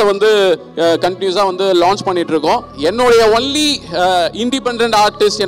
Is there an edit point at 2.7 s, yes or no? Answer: yes